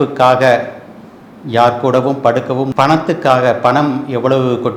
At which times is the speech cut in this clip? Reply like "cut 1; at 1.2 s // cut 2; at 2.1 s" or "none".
cut 1; at 2.7 s